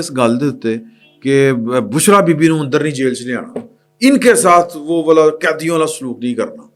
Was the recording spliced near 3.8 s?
no; 0 cuts

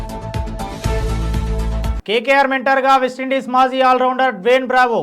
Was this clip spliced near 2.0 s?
yes; 1 cut; at 2.0 s

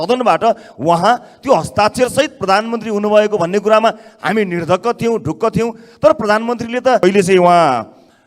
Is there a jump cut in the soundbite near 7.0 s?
yes; 1 cut; at 7.0 s

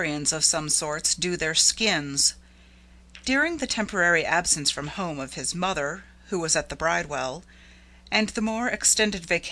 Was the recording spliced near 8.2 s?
no; 0 cuts

